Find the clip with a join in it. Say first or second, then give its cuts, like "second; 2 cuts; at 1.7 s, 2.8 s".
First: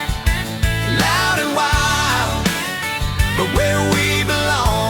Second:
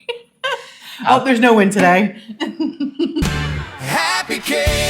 second; 1 cut; at 3.2 s